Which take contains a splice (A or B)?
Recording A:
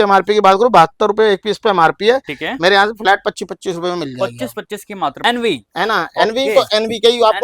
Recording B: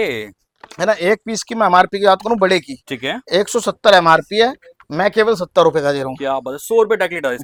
A